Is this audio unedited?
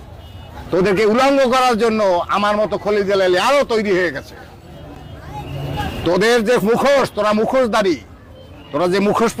yes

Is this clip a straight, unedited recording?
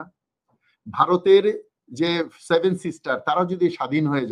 yes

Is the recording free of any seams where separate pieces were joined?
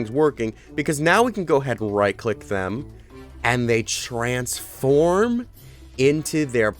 yes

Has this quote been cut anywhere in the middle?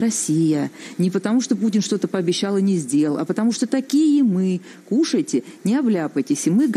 no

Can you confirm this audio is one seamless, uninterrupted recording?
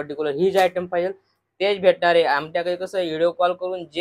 yes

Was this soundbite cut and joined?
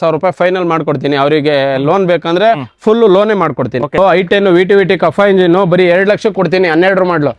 yes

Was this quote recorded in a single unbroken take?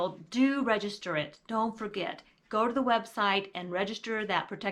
yes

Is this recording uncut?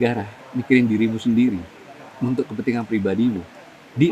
yes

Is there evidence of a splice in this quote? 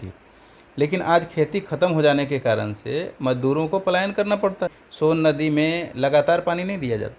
yes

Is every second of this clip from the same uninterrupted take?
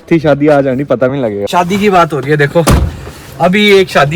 yes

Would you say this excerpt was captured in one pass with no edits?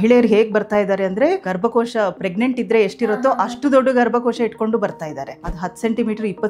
no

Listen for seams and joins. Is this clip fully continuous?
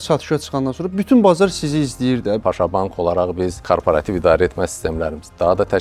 no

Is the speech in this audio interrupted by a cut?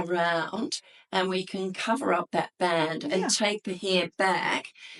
no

